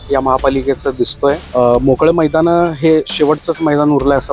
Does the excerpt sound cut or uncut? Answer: cut